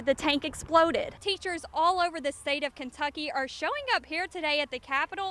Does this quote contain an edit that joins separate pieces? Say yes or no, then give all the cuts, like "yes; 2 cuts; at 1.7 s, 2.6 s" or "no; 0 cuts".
yes; 1 cut; at 1.2 s